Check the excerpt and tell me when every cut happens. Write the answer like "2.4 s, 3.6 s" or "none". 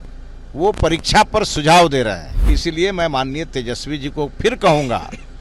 2.3 s